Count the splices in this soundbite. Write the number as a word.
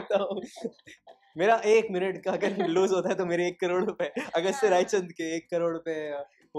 zero